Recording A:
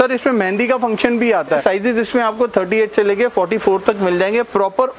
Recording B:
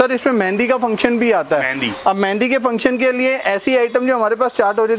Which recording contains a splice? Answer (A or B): A